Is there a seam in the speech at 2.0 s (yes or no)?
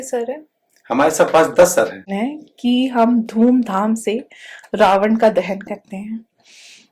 yes